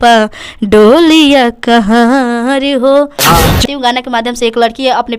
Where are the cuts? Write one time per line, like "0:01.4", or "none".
0:03.6